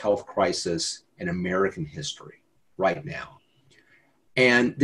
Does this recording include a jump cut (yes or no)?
no